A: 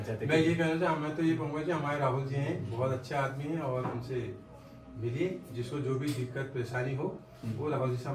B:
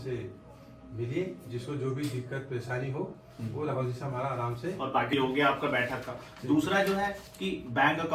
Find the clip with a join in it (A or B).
B